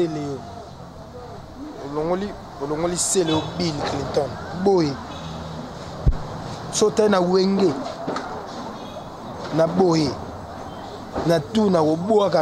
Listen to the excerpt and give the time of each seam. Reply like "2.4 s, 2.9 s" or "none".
none